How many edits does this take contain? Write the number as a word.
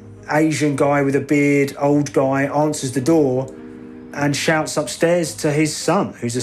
zero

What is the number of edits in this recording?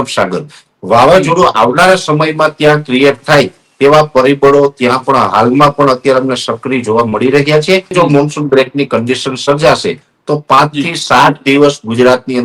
one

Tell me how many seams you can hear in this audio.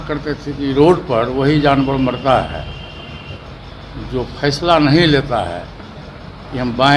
zero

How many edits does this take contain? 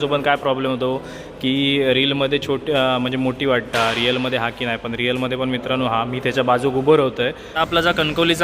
one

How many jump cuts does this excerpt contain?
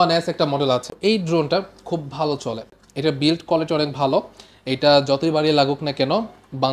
two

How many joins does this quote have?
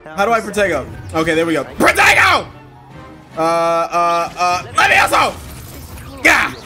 zero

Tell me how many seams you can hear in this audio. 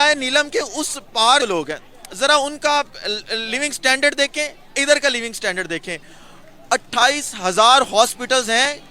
one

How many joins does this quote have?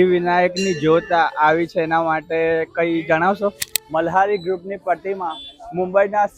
one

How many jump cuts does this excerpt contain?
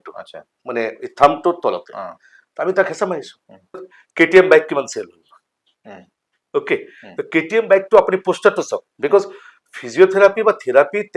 one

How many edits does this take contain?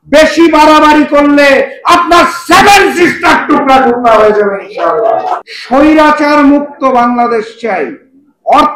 one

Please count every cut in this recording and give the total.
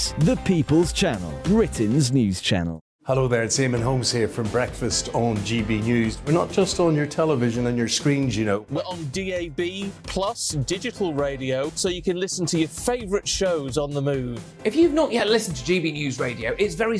one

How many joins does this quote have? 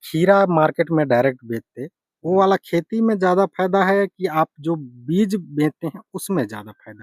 zero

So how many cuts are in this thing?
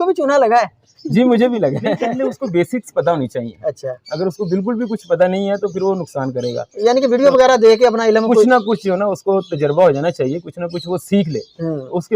one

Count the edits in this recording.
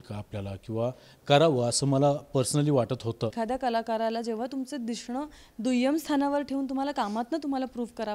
one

